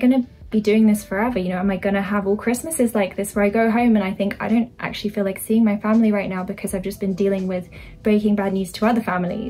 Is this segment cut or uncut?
uncut